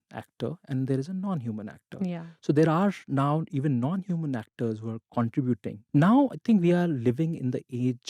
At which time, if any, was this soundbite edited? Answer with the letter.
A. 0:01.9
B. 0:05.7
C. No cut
B